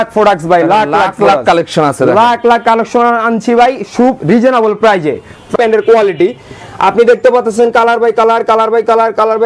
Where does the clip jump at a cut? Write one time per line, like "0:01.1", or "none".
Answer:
0:05.5